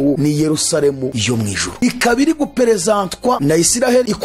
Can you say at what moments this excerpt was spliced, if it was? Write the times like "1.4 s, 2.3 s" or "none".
none